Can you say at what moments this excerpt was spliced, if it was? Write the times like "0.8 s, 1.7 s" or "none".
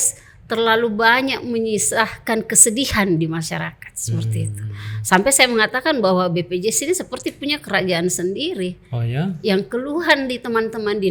none